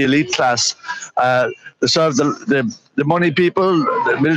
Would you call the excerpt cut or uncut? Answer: uncut